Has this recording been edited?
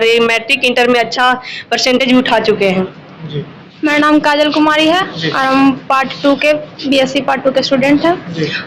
yes; 1 cut; at 3.6 s

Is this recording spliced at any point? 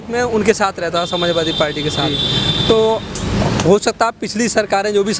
no; 0 cuts

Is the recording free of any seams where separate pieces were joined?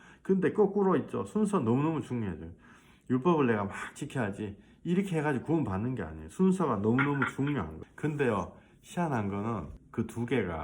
no; 2 cuts; at 7.8 s, 9.8 s

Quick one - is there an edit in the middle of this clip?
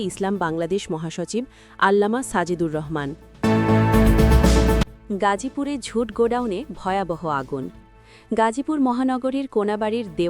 yes; 2 cuts; at 3.2 s, 4.9 s

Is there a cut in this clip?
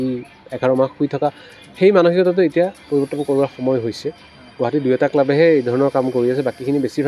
no; 0 cuts

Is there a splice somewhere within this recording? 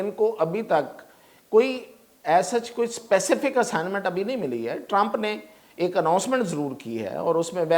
no; 0 cuts

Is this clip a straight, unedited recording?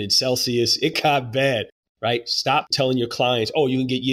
no; 3 cuts; at 0.9 s, 1.8 s, 2.7 s

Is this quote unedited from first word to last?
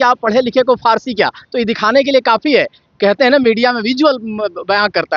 yes; 0 cuts

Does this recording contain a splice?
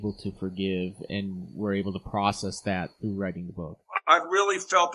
yes; 1 cut; at 1.0 s

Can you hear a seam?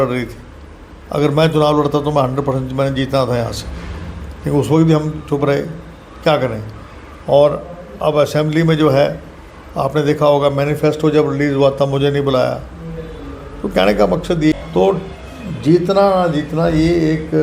yes; 1 cut; at 14.5 s

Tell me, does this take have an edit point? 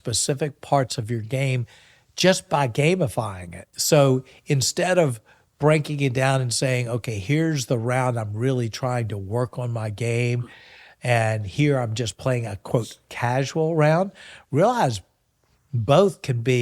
yes; 2 cuts; at 3.6 s, 7.1 s

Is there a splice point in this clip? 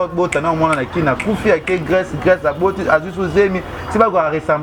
no; 0 cuts

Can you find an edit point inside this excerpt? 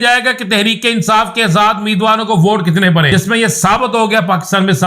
yes; 1 cut; at 3.1 s

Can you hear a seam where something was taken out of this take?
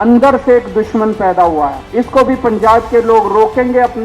yes; 1 cut; at 1.8 s

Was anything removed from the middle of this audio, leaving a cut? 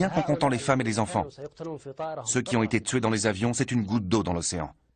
yes; 1 cut; at 2.5 s

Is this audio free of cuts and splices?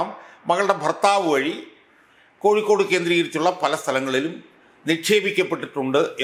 yes; 0 cuts

